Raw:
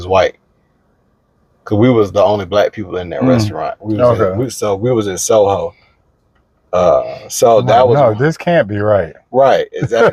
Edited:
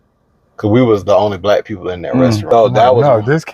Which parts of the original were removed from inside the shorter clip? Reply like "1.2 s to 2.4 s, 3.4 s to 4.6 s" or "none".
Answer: 3.6 s to 7.4 s